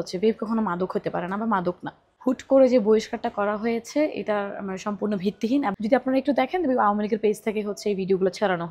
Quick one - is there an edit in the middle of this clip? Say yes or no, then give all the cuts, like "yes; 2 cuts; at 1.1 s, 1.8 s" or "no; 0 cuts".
yes; 2 cuts; at 2.0 s, 5.8 s